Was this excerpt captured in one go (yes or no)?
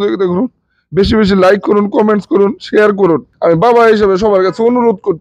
no